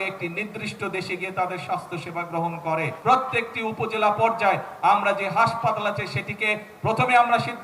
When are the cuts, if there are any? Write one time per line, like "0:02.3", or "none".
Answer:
0:02.9

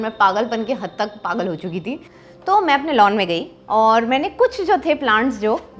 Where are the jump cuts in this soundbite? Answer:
0:02.1

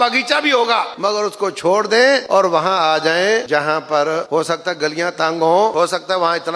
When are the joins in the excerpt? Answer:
0:00.9
0:02.2
0:03.4
0:04.2
0:05.7

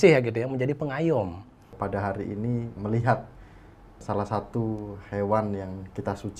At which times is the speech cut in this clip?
0:01.7
0:02.7
0:04.0

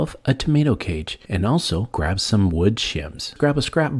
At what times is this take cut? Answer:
none

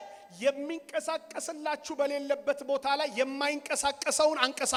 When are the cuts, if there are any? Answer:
none

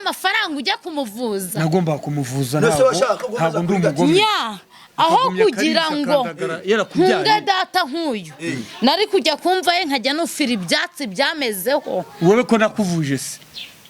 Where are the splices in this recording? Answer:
none

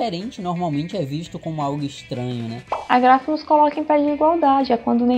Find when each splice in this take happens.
0:02.8

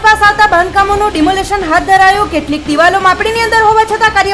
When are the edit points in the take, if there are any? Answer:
none

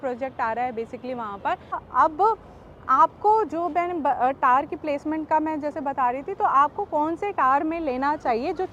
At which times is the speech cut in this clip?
0:01.8

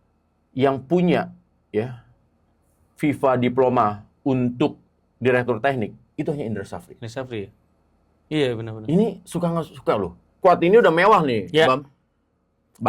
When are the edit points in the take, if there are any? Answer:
0:10.3

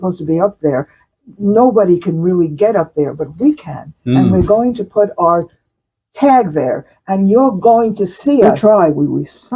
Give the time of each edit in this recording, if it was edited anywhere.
0:08.5

